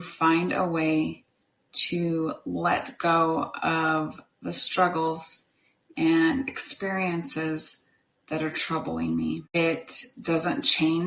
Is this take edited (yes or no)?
yes